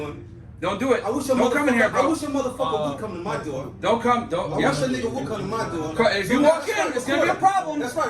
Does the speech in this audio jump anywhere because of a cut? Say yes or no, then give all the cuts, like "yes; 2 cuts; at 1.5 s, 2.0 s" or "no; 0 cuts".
yes; 1 cut; at 1.1 s